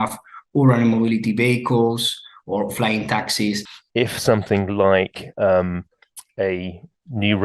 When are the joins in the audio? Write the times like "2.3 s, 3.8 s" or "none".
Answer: 3.7 s